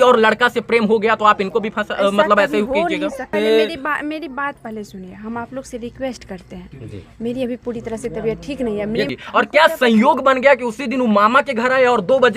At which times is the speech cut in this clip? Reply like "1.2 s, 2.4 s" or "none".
3.2 s, 9.2 s